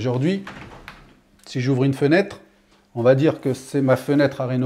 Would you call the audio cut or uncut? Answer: uncut